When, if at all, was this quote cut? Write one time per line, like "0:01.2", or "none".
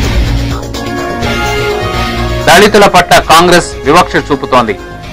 0:02.1